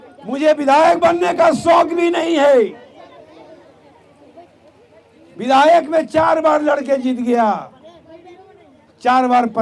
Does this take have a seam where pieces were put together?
no; 0 cuts

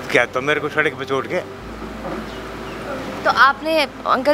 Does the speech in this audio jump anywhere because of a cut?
yes; 1 cut; at 2.9 s

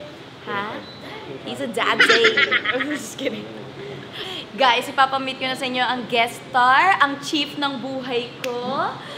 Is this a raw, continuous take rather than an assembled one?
no; 1 cut; at 4.2 s

